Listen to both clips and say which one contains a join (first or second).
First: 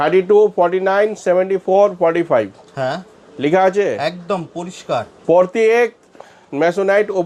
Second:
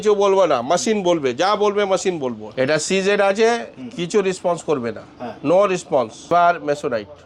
second